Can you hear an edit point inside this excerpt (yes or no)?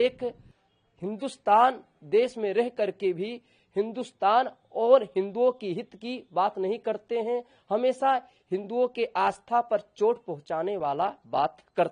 no